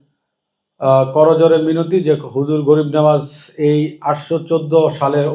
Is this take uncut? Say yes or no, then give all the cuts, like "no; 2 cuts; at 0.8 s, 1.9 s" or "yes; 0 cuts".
yes; 0 cuts